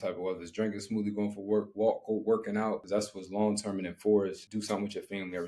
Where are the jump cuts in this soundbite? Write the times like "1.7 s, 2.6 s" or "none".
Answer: 2.8 s, 4.4 s